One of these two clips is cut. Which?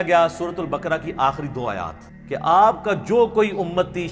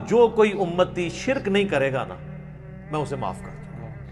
first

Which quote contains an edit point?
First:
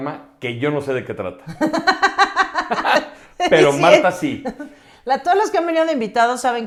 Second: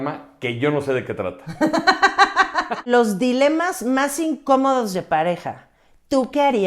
second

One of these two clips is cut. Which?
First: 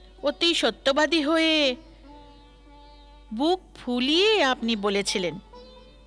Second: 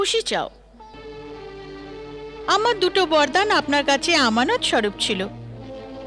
second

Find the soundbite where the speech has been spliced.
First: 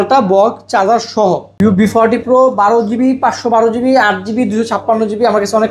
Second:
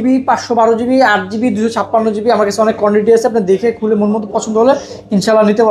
first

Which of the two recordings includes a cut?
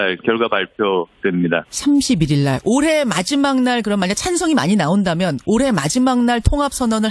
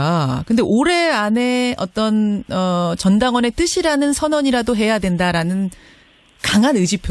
second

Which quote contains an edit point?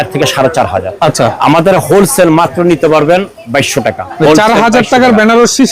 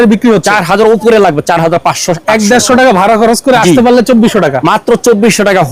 first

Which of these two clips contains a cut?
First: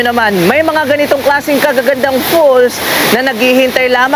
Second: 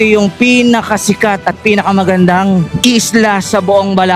second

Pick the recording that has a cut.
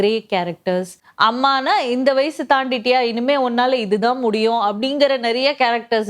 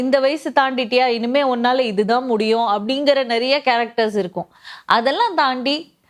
first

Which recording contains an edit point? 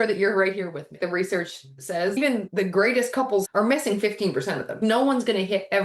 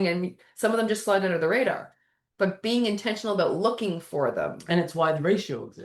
first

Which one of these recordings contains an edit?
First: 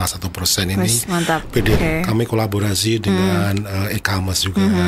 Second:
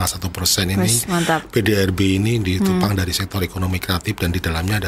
first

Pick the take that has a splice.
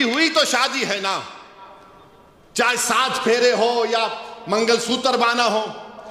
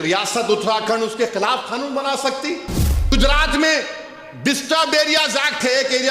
second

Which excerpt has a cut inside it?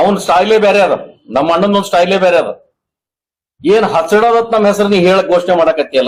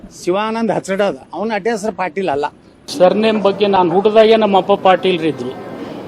second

